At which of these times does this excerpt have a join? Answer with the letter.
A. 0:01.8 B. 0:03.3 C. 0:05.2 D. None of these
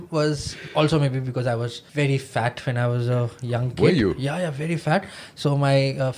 A